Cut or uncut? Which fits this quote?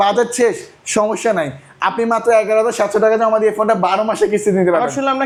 uncut